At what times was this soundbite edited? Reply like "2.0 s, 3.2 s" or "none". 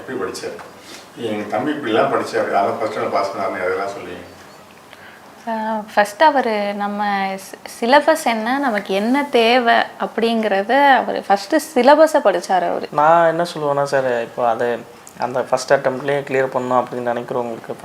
12.9 s